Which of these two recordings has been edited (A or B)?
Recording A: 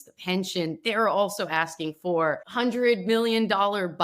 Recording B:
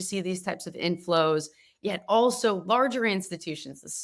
A